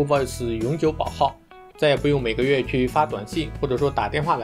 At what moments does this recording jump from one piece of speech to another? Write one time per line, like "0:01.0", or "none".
none